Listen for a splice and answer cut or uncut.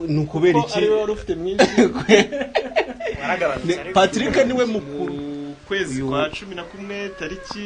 cut